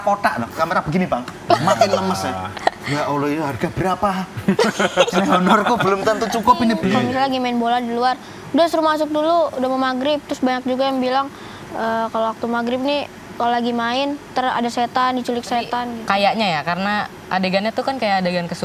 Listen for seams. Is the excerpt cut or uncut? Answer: cut